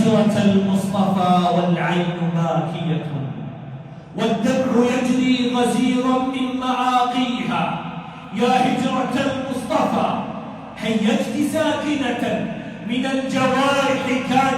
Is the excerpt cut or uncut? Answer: uncut